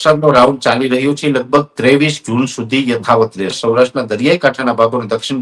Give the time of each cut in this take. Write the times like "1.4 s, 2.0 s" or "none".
3.6 s